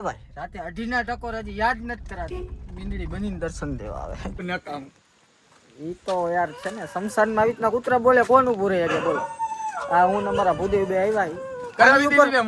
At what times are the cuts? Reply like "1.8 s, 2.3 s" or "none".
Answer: 4.5 s